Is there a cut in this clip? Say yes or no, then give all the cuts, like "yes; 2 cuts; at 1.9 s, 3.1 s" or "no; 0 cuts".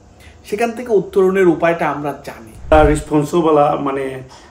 yes; 1 cut; at 2.7 s